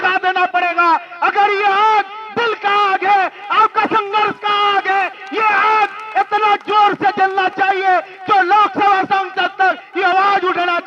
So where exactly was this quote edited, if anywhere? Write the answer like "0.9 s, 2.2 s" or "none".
none